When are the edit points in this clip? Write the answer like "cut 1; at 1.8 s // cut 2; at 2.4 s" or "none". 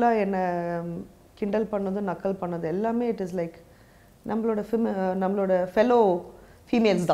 none